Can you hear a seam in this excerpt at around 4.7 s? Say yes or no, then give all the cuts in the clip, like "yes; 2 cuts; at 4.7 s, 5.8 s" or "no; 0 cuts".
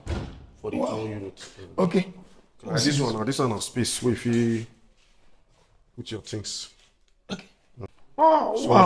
no; 1 cut; at 7.9 s